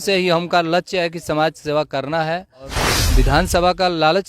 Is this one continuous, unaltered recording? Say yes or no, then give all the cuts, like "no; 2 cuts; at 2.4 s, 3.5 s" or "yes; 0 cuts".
no; 1 cut; at 2.9 s